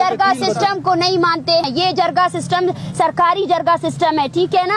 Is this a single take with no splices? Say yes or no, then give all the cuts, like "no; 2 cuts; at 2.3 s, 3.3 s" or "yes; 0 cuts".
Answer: no; 1 cut; at 1.6 s